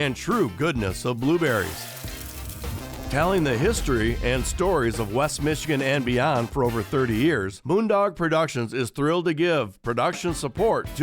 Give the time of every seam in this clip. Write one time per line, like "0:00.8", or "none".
0:07.5